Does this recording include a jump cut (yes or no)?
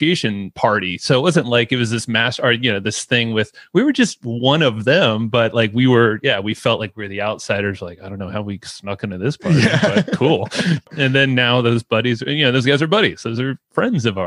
no